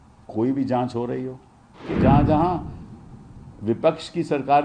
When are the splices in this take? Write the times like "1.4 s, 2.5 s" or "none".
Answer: 1.9 s